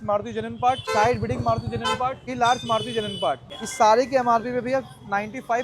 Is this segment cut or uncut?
cut